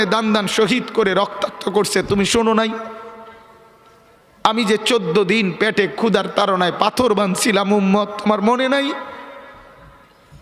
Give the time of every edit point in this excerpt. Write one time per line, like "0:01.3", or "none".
none